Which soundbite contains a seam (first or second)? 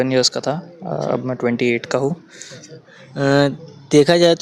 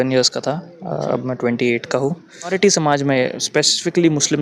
second